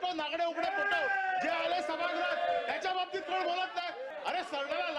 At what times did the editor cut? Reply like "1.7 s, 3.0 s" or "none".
4.1 s